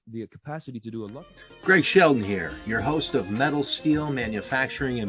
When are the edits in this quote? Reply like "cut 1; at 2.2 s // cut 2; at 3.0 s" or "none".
cut 1; at 1.2 s